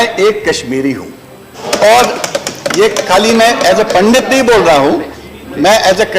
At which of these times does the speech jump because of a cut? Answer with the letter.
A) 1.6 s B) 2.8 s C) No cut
A